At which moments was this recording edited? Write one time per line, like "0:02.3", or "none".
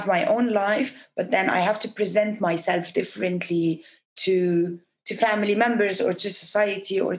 none